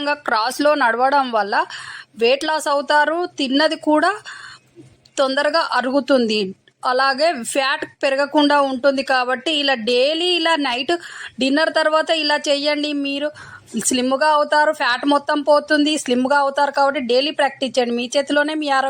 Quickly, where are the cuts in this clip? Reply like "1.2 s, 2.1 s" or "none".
none

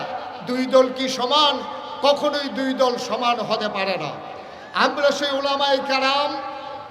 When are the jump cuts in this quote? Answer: none

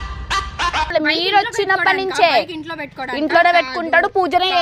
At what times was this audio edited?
0.9 s

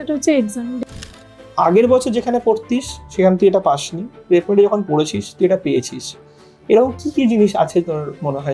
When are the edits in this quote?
1.1 s

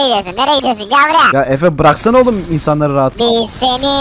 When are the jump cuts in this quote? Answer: 1.3 s

